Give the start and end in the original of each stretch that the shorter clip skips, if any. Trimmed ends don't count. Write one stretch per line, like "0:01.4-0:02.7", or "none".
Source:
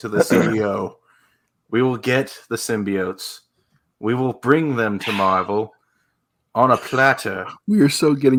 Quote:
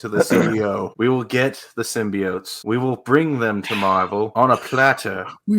0:00.9-0:01.6
0:03.2-0:03.9
0:05.7-0:06.5